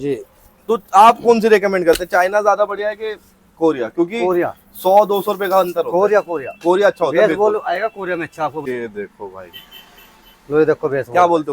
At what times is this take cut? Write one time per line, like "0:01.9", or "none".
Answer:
0:08.6